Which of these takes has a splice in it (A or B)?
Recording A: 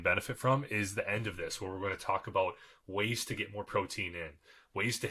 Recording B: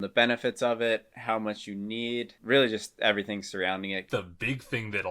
B